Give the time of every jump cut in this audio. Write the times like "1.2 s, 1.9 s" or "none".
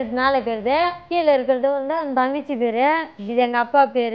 1.0 s, 3.2 s